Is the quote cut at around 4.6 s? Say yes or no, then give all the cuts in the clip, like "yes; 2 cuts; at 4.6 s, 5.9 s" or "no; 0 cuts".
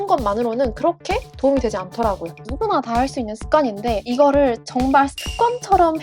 no; 1 cut; at 2.4 s